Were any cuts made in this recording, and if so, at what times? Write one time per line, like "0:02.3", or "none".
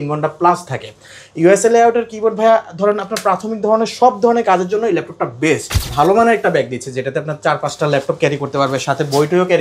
0:05.9